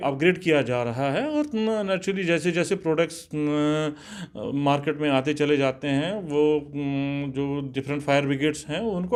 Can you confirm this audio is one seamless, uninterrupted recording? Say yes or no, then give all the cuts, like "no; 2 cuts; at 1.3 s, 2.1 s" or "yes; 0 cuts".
yes; 0 cuts